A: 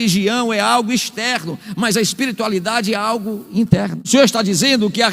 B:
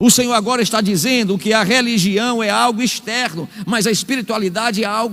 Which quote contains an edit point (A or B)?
A